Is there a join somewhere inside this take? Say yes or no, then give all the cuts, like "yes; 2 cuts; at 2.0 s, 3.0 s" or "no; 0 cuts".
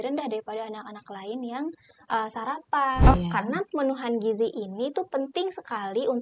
yes; 1 cut; at 3.1 s